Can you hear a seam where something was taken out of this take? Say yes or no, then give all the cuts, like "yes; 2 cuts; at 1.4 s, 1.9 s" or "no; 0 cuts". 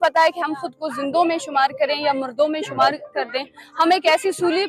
no; 0 cuts